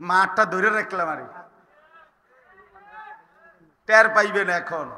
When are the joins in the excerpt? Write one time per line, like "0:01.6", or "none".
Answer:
none